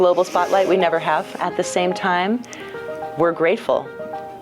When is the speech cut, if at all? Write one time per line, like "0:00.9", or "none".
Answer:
0:01.3

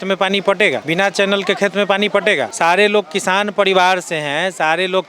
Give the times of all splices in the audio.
0:00.8
0:02.5

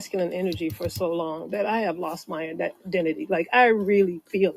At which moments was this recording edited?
none

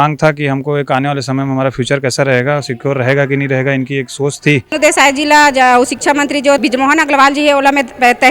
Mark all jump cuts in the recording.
0:04.8
0:06.6

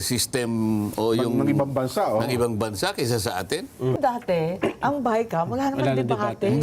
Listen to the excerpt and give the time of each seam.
0:04.0

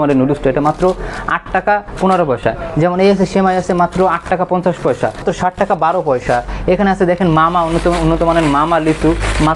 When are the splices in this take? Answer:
0:05.2

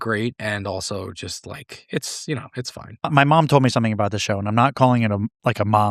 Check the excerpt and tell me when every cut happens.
0:03.1

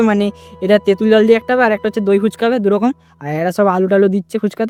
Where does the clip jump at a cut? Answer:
none

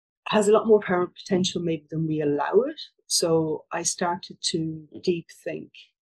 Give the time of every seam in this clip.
none

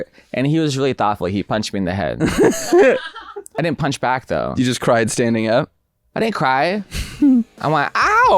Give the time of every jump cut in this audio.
0:03.6

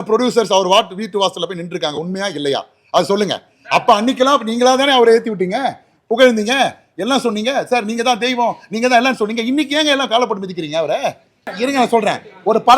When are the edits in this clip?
0:11.5

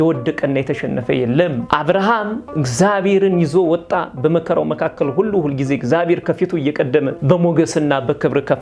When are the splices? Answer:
0:01.6
0:07.2

